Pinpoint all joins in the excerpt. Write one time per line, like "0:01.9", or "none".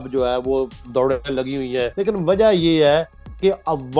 0:01.9